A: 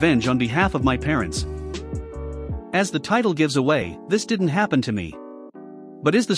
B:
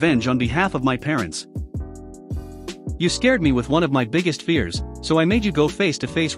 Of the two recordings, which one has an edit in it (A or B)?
B